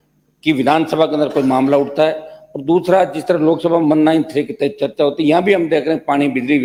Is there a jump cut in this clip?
no; 0 cuts

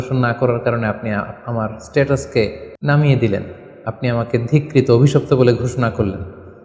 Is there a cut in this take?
yes; 1 cut; at 2.7 s

